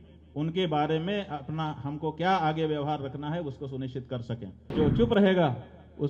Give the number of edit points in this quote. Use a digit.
1